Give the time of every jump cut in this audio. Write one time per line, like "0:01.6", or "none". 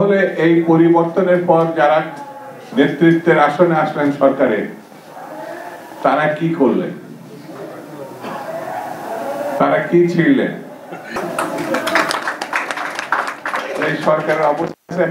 none